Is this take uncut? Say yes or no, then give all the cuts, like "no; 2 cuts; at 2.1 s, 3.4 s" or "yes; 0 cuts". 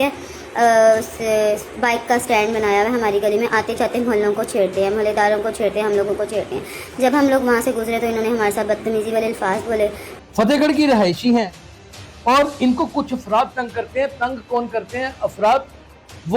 no; 1 cut; at 10.1 s